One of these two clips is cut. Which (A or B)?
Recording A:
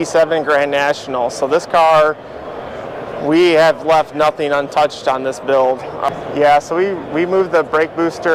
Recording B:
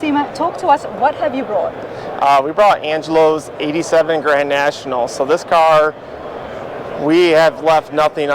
A